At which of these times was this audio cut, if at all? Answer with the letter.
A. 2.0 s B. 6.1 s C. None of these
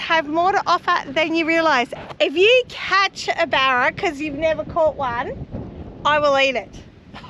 A